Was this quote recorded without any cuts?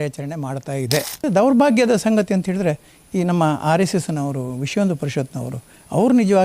no; 1 cut; at 1.1 s

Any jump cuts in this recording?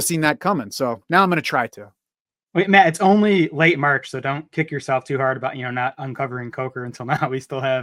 no; 0 cuts

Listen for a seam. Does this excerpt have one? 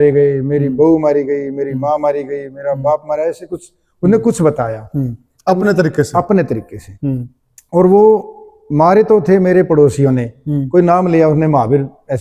no; 0 cuts

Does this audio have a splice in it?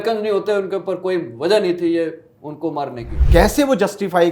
yes; 1 cut; at 3.1 s

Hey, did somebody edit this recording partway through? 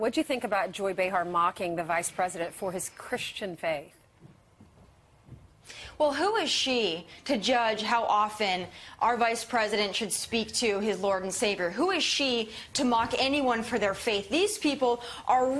yes; 1 cut; at 8.4 s

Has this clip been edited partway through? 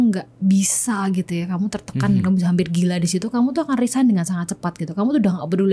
no; 0 cuts

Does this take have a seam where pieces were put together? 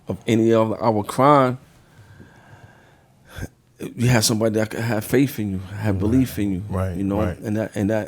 no; 0 cuts

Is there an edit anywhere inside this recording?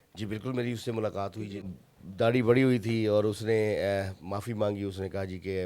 yes; 1 cut; at 1.8 s

